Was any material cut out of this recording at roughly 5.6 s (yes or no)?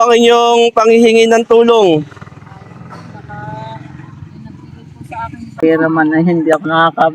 yes